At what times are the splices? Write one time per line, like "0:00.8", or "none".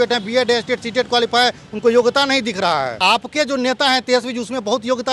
0:03.0

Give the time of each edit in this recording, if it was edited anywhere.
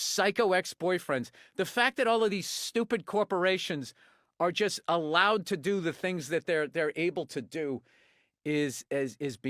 none

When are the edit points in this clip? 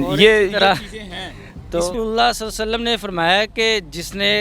0:01.9

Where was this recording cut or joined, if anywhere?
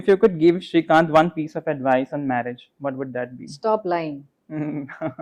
none

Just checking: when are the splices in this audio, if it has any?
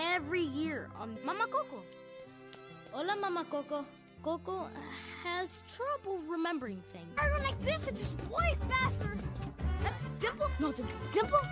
0:04.0

